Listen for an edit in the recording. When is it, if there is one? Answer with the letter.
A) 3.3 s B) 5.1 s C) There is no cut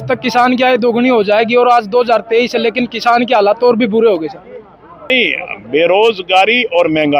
B